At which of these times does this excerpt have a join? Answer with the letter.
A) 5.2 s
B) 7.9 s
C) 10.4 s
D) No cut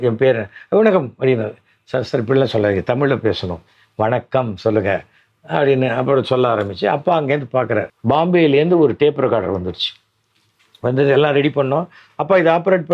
B